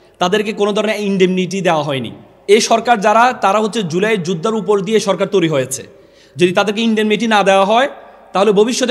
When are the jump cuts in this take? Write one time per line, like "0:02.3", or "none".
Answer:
0:02.3